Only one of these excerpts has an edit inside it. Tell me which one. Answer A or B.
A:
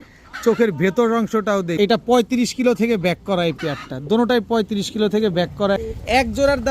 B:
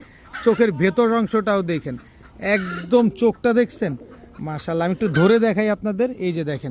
A